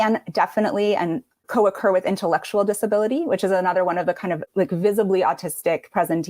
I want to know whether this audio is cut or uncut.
cut